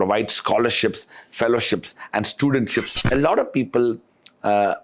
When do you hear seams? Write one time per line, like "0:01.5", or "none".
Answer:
0:03.0